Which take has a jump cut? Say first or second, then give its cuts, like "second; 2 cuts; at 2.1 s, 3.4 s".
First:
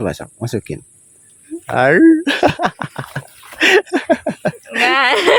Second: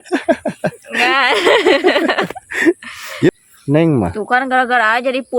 second; 1 cut; at 3.3 s